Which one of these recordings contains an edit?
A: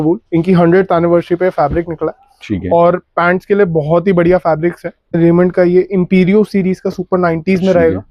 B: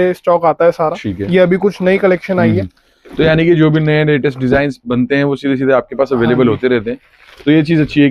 A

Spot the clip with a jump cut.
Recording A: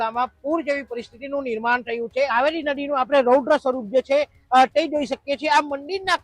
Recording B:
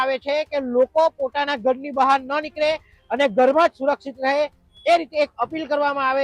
A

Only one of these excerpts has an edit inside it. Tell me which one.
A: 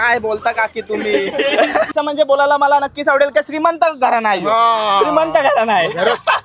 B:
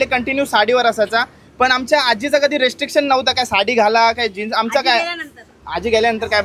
A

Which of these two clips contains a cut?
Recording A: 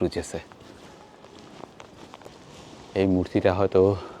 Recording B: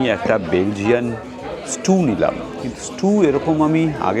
A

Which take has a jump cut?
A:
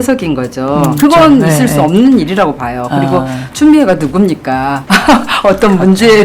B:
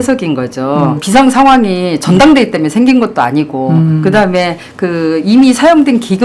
A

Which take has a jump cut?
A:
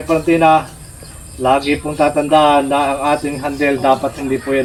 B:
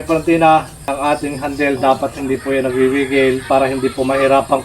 B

